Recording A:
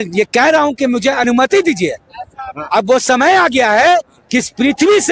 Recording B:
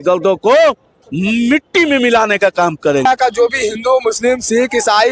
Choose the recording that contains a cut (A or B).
B